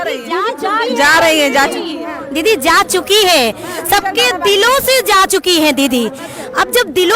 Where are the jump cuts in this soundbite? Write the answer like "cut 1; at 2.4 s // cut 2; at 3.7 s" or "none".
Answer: none